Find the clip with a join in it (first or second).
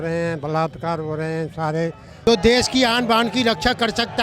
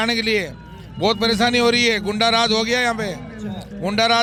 first